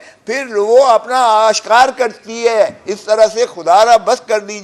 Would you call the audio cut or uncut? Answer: uncut